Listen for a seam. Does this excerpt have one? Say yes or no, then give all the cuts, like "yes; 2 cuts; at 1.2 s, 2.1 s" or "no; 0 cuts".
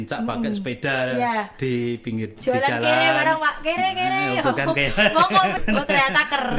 no; 0 cuts